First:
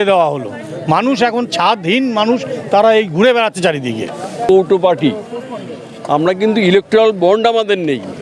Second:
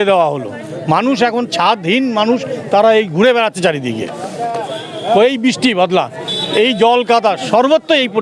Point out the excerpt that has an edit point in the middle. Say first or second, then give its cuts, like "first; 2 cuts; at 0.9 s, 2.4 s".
first; 1 cut; at 4.5 s